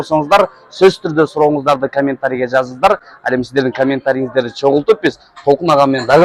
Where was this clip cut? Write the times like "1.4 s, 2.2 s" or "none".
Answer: none